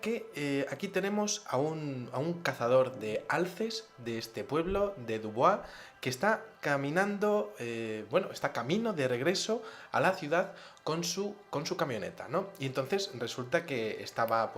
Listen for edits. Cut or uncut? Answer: cut